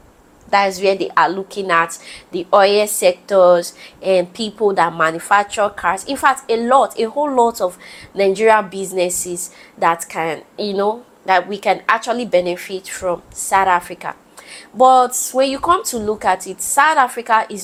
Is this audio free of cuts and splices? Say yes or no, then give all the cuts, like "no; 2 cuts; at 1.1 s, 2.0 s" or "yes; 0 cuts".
yes; 0 cuts